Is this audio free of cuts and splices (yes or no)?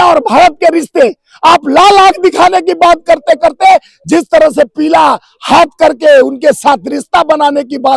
yes